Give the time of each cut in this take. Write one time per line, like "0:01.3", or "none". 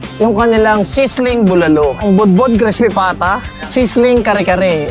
0:02.0
0:03.5